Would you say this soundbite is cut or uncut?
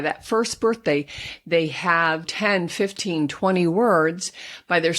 cut